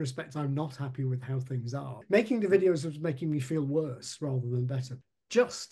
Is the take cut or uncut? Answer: cut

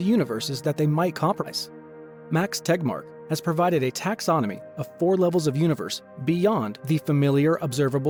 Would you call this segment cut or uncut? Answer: uncut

